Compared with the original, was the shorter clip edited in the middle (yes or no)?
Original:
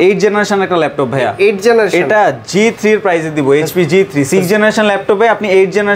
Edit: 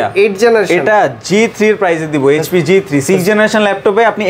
no